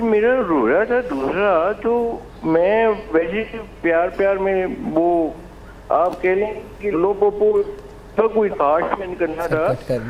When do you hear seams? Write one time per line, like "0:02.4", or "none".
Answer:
none